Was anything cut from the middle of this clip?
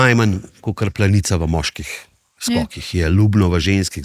no; 0 cuts

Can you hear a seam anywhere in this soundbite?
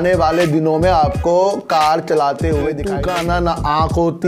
yes; 1 cut; at 2.8 s

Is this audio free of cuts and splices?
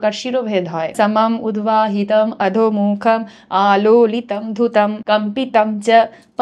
no; 2 cuts; at 0.9 s, 5.0 s

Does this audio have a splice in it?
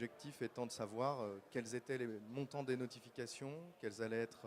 yes; 1 cut; at 2.2 s

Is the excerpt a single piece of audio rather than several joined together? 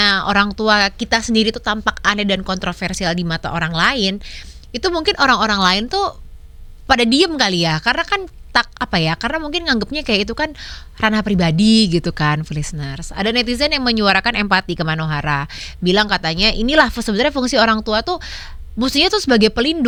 yes; 0 cuts

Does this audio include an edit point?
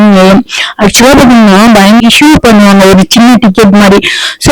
yes; 1 cut; at 2.0 s

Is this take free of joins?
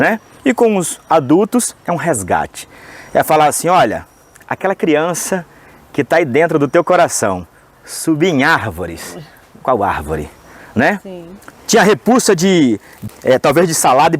no; 1 cut; at 13.0 s

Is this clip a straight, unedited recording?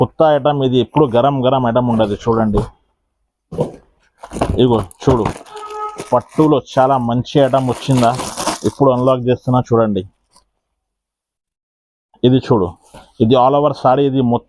yes; 0 cuts

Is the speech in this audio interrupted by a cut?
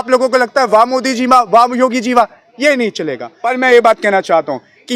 yes; 1 cut; at 3.3 s

